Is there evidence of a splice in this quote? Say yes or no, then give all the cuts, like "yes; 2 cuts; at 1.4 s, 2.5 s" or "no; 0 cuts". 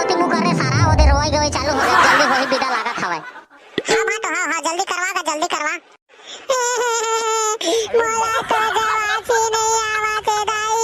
no; 0 cuts